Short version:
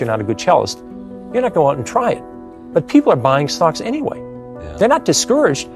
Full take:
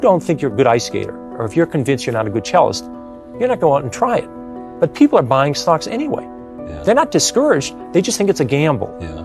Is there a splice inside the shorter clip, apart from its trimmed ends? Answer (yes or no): no